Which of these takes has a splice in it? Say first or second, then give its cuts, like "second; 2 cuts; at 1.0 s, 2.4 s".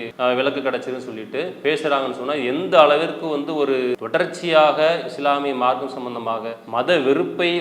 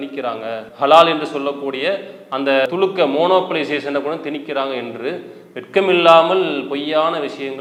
first; 2 cuts; at 1.5 s, 6.6 s